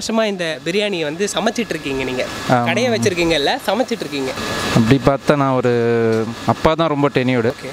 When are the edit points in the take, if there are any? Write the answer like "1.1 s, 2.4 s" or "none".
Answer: none